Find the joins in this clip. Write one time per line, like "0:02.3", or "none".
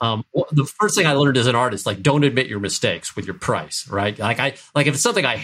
none

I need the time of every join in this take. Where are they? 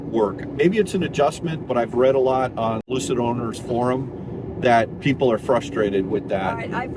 0:02.9

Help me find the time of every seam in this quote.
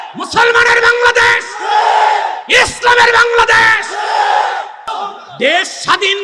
0:04.9

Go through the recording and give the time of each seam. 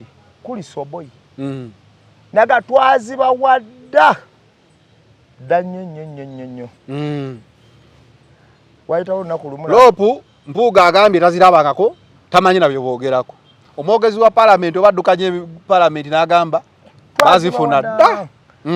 none

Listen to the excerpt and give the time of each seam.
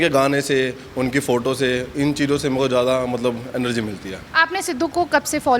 none

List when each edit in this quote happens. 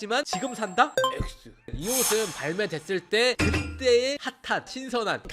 none

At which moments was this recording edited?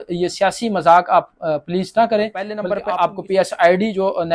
0:02.7

